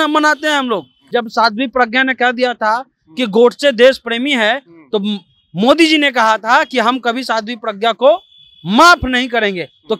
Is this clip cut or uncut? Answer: cut